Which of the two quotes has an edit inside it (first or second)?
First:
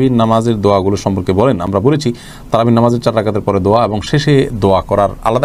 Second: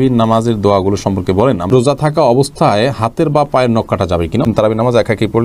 second